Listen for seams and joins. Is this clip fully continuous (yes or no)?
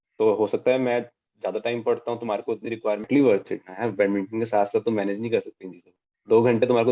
no